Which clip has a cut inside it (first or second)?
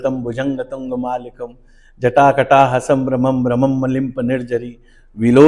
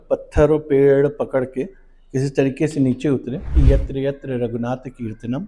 second